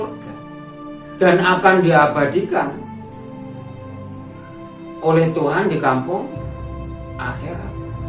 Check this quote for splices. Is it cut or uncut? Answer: uncut